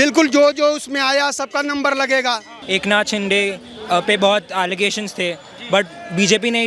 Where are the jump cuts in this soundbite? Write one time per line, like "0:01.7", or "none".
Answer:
0:02.6